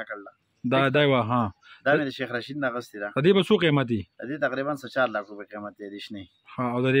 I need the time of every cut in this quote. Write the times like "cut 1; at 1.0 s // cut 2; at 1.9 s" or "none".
none